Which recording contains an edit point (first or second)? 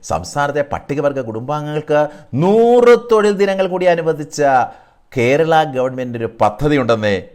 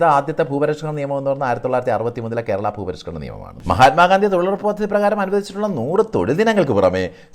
second